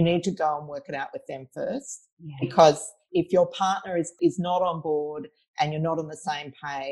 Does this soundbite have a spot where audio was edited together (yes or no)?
yes